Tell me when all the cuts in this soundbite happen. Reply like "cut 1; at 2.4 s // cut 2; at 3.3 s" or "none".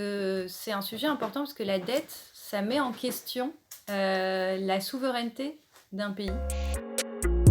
cut 1; at 6.4 s

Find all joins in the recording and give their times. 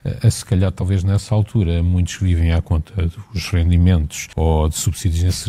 cut 1; at 4.3 s

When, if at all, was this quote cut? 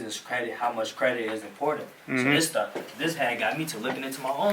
none

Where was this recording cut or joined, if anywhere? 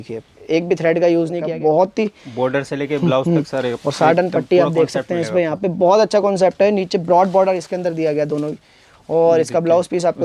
cut 1; at 1.4 s

